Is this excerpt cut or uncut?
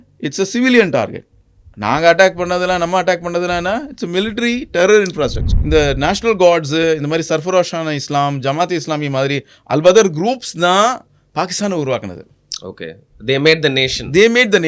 cut